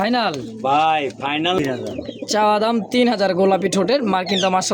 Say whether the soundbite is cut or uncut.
cut